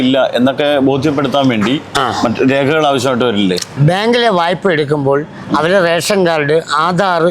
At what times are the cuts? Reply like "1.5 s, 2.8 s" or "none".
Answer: 3.8 s